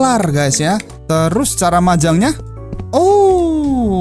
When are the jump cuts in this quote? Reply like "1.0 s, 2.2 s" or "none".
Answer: 0.9 s